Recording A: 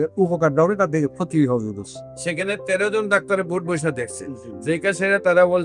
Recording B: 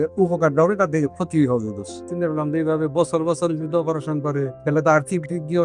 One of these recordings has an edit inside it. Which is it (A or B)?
B